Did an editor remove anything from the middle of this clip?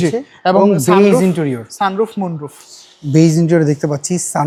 no; 0 cuts

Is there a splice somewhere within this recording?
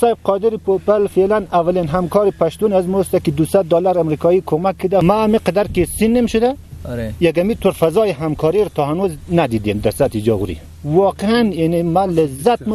yes; 1 cut; at 5.0 s

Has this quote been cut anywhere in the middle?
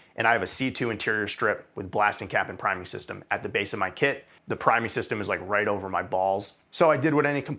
yes; 2 cuts; at 4.3 s, 6.6 s

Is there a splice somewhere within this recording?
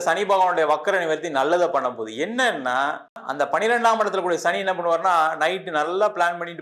yes; 1 cut; at 3.2 s

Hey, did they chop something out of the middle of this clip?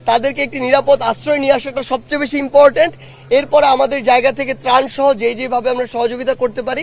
no; 0 cuts

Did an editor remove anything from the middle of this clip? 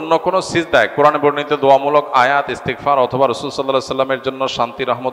no; 0 cuts

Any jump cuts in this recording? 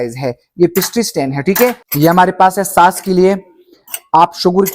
yes; 1 cut; at 1.8 s

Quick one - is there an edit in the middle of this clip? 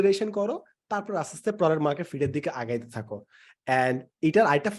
no; 0 cuts

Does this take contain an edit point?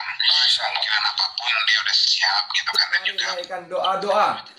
yes; 1 cut; at 3.5 s

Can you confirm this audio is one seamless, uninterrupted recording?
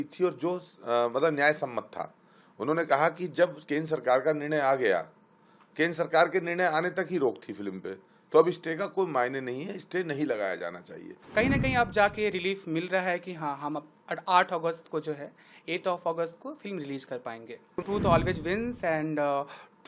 no; 2 cuts; at 11.2 s, 17.8 s

